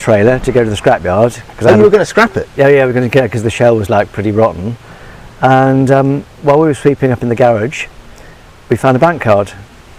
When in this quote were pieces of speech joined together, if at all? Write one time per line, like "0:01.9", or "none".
none